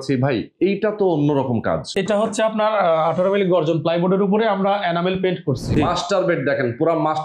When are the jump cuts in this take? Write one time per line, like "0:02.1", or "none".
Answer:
0:02.0
0:05.7